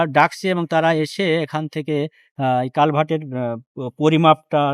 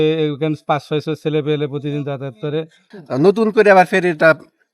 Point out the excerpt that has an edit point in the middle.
second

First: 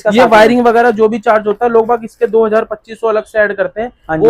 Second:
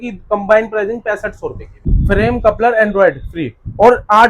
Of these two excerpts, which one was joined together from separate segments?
second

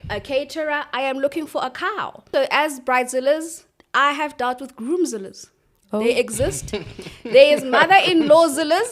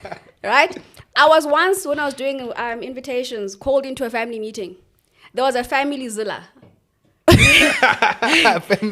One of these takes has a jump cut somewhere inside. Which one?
first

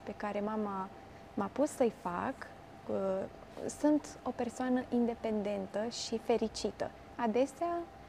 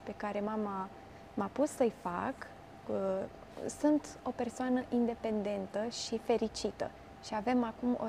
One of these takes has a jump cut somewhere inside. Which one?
first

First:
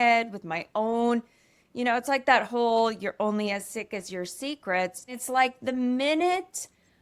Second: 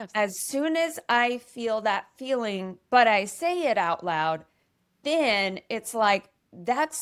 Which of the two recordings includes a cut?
first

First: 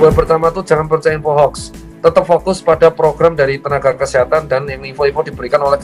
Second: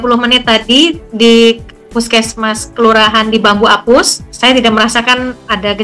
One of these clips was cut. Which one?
second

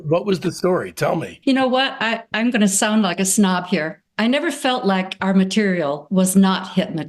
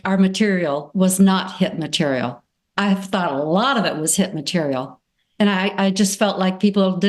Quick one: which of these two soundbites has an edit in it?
first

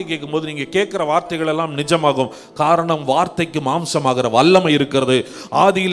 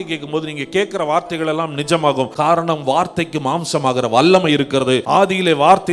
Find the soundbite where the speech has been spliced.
second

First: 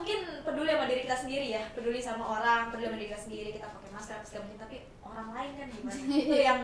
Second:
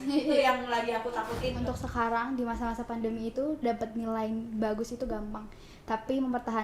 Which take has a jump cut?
second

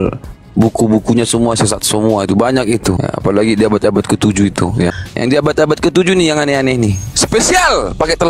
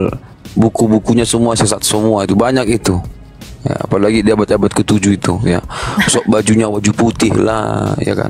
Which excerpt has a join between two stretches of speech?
first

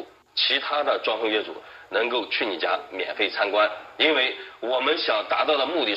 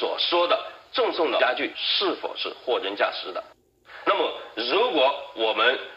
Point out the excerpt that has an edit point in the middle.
first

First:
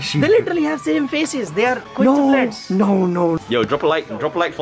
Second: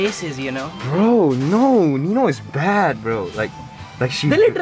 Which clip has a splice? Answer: first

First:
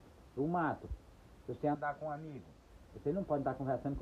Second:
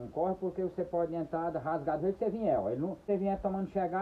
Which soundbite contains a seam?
second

